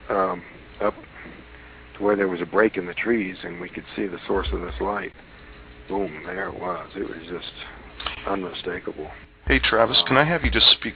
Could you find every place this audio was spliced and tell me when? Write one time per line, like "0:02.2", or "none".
0:01.1

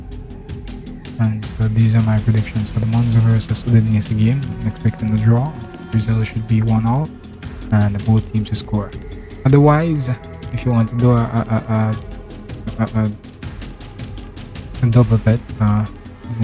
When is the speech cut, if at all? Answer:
0:13.2
0:14.8

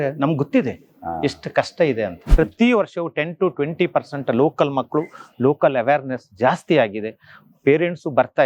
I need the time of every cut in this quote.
0:02.3

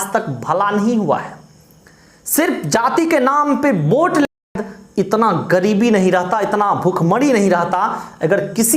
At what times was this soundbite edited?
0:04.3

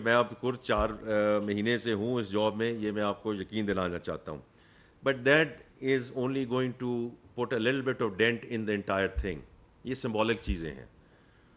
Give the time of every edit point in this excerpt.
none

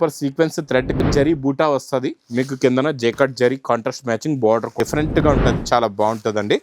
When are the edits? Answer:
0:01.0
0:04.7

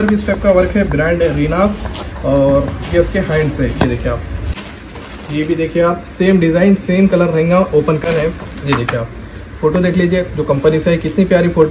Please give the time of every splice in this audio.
0:04.4
0:08.0

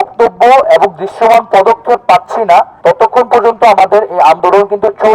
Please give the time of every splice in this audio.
0:02.7

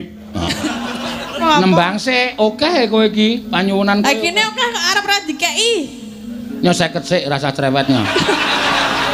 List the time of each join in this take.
0:01.4

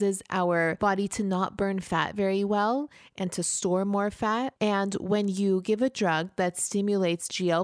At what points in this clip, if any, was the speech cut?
0:00.8
0:04.5

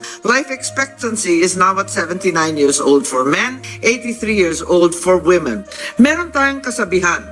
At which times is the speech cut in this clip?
0:05.7

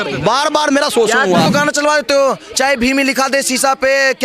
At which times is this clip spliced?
0:01.5

